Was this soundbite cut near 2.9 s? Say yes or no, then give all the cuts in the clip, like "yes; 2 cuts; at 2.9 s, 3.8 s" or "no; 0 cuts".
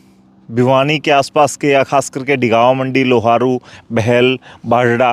no; 0 cuts